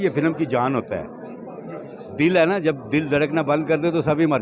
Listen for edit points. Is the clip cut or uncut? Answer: uncut